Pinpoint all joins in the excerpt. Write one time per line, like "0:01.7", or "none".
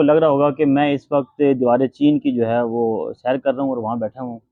none